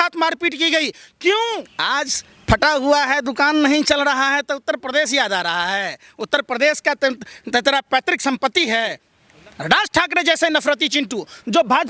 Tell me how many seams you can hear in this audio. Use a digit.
2